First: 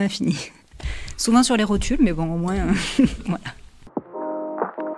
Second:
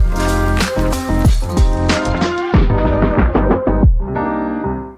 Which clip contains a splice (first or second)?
first